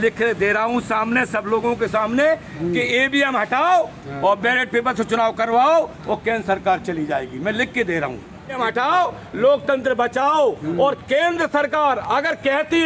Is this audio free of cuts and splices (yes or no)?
no